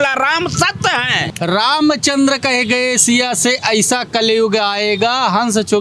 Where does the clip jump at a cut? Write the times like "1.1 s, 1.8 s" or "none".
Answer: 1.2 s

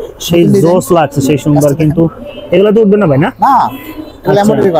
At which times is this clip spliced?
none

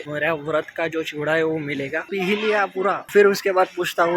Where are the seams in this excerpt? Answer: 2.1 s

